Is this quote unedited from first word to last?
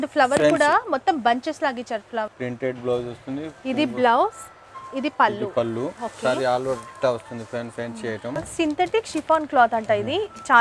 no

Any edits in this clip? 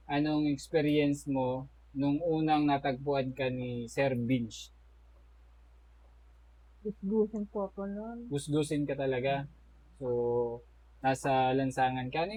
no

